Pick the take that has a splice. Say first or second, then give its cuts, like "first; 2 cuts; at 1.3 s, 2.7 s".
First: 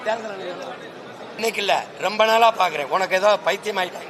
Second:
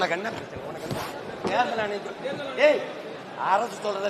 first; 1 cut; at 1.4 s